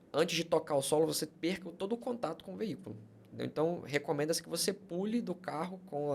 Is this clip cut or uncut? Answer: uncut